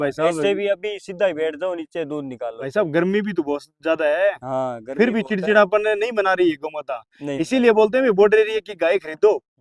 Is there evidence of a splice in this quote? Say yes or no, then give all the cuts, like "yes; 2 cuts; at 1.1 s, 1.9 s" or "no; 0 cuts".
no; 0 cuts